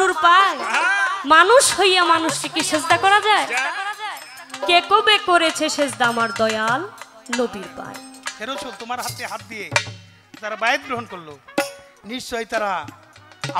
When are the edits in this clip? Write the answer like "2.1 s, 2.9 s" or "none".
8.2 s